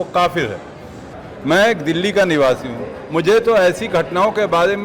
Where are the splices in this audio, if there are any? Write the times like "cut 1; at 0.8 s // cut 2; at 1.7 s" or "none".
cut 1; at 1.0 s

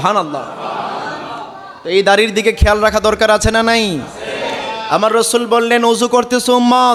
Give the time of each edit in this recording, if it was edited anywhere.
none

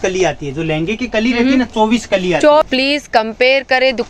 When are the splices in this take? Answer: cut 1; at 2.7 s

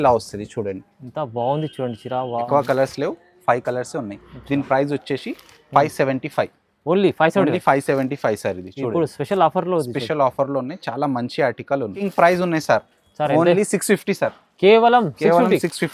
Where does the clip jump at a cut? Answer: cut 1; at 2.5 s // cut 2; at 12.0 s

